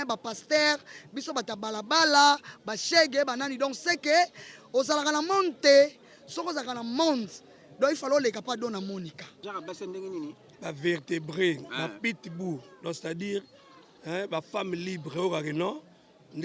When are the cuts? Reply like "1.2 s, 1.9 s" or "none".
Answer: 9.3 s